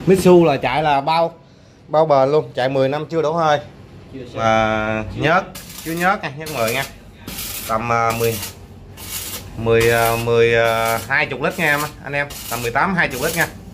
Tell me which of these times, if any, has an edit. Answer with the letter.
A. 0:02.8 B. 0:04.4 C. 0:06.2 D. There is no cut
B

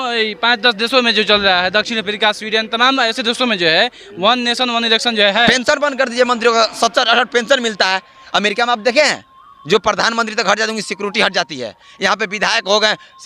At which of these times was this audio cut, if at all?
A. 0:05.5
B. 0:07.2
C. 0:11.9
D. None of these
A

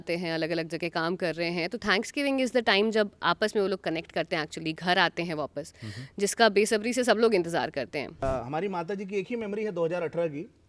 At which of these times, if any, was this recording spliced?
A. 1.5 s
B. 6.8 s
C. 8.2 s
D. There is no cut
C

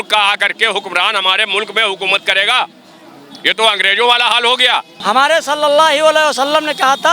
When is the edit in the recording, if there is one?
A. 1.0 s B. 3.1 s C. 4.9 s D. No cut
C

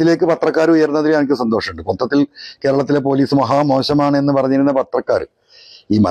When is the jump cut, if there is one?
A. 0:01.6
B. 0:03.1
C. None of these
C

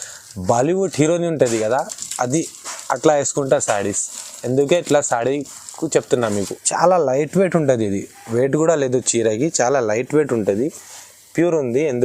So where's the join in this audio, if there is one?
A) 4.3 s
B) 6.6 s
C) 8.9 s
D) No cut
B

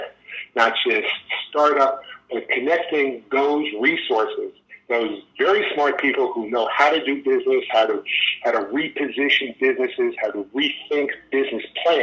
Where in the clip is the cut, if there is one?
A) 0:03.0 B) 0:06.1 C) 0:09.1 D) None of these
D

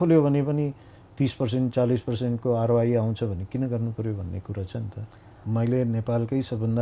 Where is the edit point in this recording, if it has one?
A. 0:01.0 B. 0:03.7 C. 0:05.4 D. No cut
C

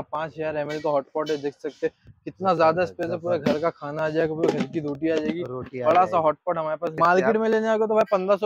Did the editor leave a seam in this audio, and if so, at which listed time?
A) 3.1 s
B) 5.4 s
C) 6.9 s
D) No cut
C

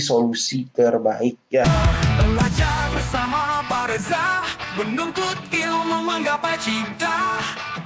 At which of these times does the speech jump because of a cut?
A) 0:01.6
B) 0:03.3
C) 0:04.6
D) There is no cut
A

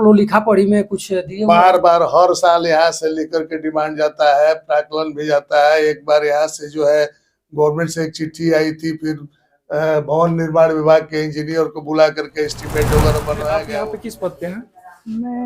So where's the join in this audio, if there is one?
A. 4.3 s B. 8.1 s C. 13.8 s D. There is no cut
C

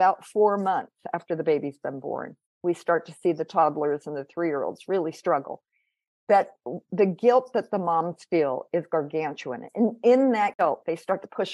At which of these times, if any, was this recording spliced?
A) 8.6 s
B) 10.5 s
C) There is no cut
B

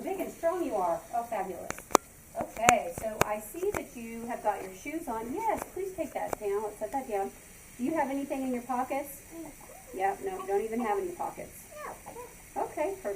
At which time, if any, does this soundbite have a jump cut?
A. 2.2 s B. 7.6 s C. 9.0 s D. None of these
A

